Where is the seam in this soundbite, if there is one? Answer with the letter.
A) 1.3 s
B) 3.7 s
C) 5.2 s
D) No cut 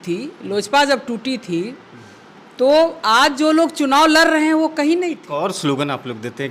C